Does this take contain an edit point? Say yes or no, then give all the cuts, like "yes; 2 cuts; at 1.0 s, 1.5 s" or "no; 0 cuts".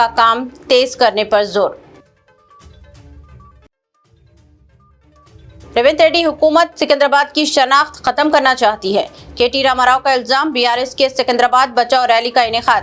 no; 0 cuts